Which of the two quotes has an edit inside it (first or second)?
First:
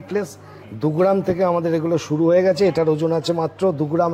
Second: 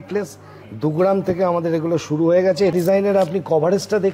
second